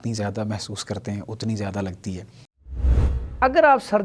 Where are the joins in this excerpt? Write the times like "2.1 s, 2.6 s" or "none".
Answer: 2.7 s